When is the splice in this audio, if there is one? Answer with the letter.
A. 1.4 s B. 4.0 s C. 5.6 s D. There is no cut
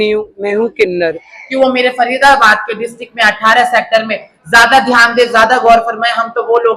A